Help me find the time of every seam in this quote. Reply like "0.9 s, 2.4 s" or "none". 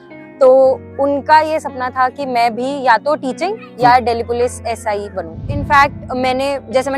5.5 s